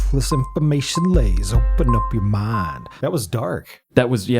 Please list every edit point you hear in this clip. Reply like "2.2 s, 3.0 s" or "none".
2.9 s